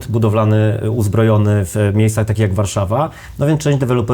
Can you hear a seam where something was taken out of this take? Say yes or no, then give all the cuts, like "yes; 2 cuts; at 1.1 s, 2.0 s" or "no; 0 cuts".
no; 0 cuts